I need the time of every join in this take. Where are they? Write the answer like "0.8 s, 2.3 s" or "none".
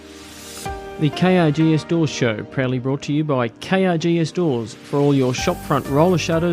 0.9 s